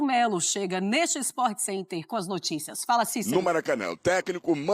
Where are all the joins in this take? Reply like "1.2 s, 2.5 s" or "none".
3.2 s